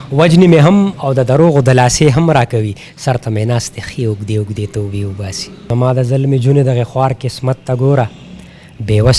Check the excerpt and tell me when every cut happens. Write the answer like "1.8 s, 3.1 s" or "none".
5.7 s